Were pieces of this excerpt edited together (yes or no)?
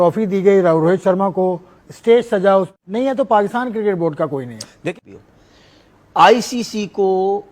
yes